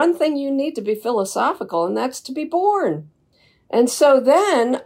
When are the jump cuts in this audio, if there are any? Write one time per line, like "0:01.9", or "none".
none